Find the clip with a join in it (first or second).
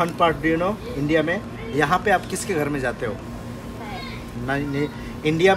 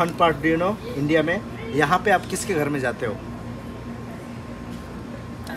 first